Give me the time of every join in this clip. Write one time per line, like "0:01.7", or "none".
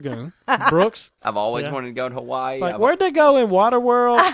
0:01.1